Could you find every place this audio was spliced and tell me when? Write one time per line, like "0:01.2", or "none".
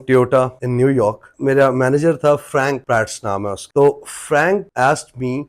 0:01.3
0:03.6